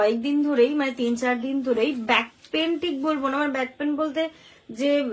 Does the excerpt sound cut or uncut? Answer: uncut